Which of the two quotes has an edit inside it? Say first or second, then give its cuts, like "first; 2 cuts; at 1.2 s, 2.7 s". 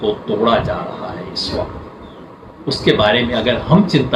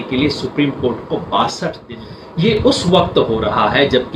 second; 1 cut; at 1.8 s